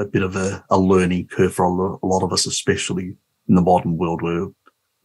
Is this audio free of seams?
yes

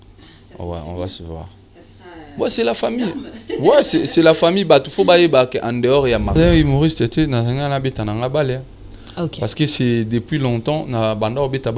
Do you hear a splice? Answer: yes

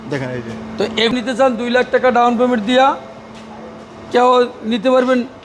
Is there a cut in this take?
yes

